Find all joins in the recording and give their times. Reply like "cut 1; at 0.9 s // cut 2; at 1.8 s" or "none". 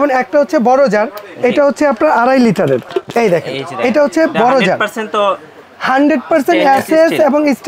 cut 1; at 2.9 s